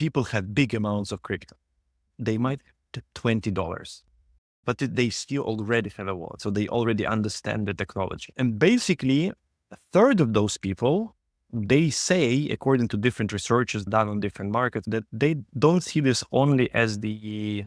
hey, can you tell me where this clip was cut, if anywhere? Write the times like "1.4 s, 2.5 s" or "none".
6.3 s, 8.2 s, 13.9 s, 14.8 s